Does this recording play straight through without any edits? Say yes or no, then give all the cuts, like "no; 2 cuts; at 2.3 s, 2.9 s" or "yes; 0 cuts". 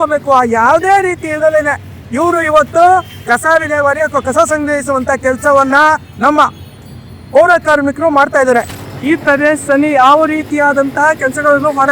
no; 1 cut; at 8.8 s